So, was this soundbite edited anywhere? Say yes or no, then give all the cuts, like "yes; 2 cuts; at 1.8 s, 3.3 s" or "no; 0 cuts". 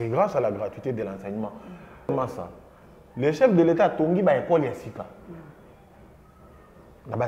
yes; 1 cut; at 2.1 s